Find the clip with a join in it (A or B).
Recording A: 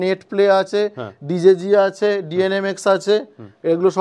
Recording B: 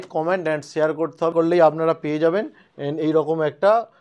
B